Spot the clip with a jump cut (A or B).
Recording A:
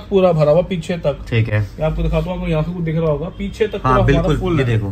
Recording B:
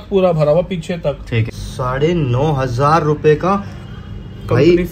B